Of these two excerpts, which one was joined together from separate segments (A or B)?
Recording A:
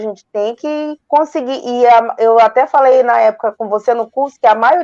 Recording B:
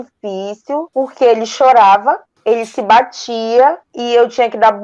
B